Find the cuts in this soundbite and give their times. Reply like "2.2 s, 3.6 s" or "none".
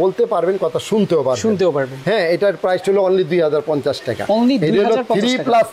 none